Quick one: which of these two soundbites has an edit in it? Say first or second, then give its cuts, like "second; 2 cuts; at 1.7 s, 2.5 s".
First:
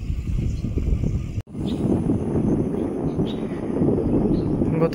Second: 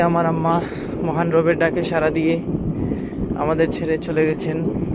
first; 1 cut; at 1.4 s